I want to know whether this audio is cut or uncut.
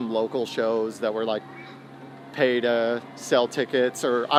uncut